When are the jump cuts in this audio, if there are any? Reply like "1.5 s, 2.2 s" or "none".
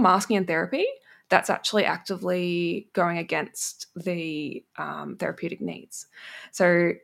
none